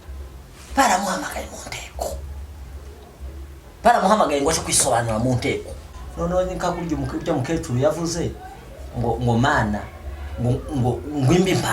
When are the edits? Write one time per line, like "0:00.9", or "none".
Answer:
0:05.8